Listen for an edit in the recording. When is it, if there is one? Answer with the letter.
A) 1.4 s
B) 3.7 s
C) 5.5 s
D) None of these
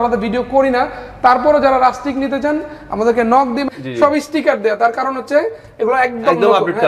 B